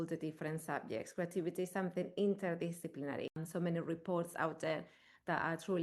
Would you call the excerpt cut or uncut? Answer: cut